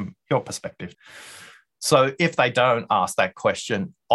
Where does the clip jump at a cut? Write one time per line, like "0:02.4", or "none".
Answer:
0:00.9